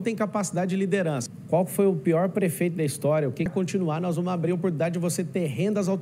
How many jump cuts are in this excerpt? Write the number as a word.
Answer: two